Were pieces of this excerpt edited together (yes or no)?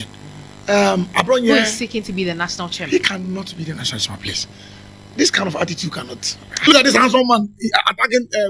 yes